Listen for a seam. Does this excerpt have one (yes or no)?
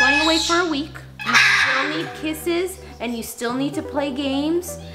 yes